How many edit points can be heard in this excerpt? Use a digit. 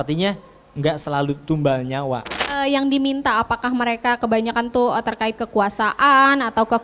1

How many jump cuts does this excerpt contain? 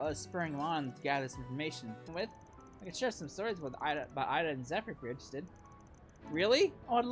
1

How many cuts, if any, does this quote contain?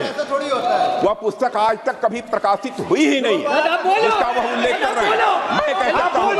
0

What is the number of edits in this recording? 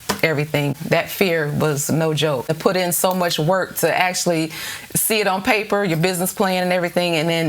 2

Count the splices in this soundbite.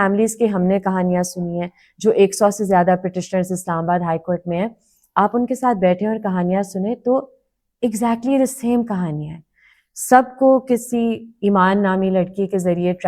0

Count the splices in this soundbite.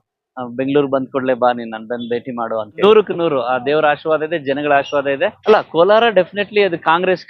2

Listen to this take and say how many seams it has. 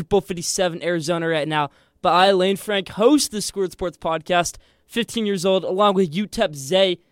0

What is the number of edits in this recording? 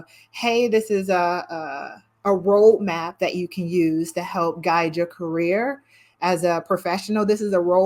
0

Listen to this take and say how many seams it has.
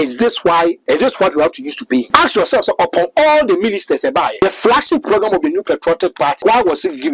4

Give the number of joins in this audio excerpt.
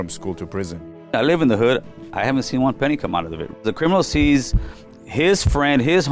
2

